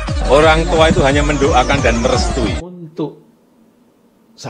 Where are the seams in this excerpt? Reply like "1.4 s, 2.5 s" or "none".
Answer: 2.8 s